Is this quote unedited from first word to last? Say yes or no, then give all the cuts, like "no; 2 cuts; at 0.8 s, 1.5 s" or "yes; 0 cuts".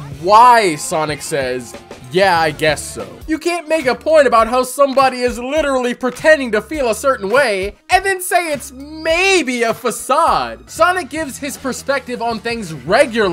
no; 2 cuts; at 3.2 s, 10.6 s